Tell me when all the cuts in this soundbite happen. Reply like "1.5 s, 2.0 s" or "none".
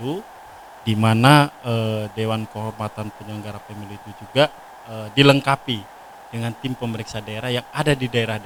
none